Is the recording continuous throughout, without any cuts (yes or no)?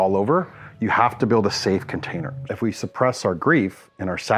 no